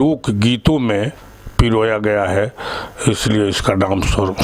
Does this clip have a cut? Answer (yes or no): no